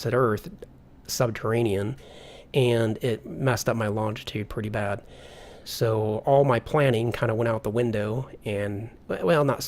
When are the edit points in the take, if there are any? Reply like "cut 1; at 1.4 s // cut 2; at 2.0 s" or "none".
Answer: none

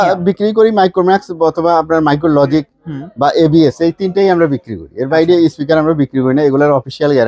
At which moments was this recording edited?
none

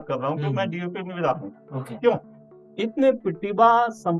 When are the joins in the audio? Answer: cut 1; at 2.3 s

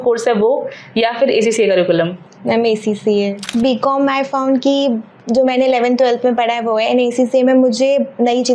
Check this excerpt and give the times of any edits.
cut 1; at 3.5 s

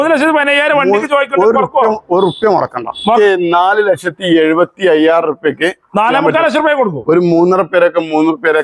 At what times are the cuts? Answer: cut 1; at 3.2 s

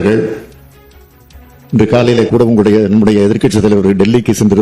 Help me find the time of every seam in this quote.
none

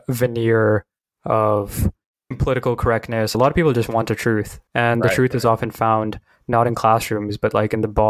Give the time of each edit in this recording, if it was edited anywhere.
cut 1; at 3.3 s

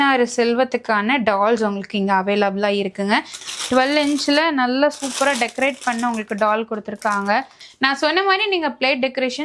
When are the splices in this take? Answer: cut 1; at 3.4 s // cut 2; at 7.6 s

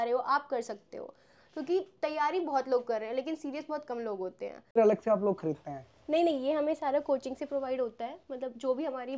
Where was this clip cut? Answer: cut 1; at 4.7 s

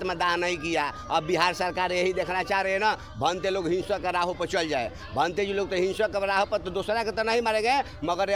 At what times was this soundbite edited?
none

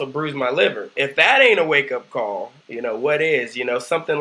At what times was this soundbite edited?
cut 1; at 1.0 s

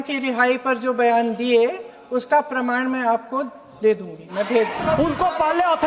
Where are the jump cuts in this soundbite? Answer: cut 1; at 4.8 s

